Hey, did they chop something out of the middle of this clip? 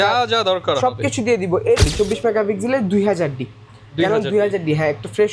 yes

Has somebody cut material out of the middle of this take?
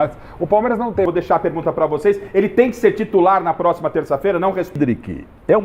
yes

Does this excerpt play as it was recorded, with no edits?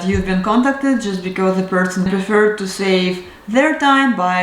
no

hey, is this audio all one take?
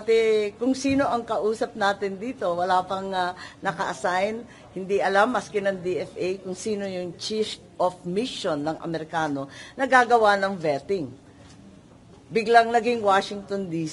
yes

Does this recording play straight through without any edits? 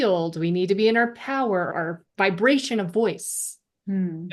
no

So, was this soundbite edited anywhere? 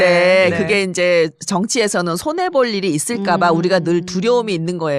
yes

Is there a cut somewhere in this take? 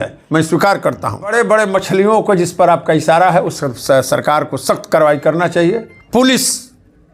yes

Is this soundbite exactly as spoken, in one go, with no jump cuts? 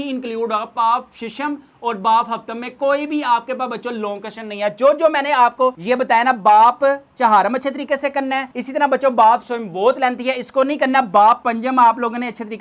yes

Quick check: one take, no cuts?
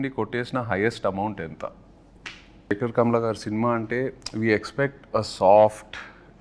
no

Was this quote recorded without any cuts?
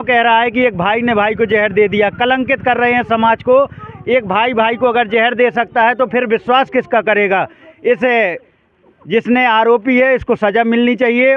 yes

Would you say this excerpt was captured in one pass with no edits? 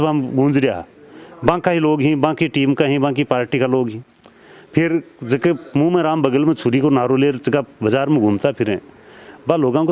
yes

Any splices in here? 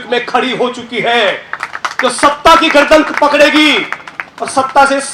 no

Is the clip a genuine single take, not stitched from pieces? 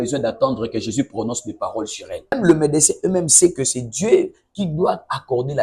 no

